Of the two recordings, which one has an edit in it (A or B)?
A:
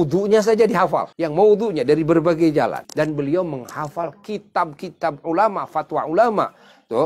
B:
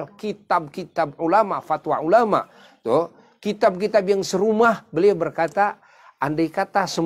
A